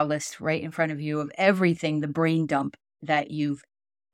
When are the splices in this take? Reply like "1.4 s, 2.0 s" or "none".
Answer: 2.9 s